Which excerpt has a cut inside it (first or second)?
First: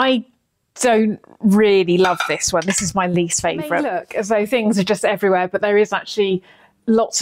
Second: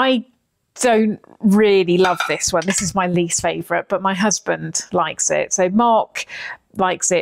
first